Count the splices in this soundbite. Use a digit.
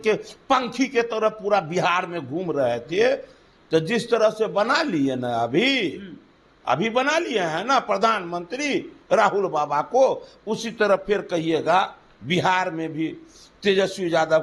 0